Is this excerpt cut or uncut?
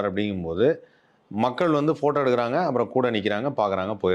uncut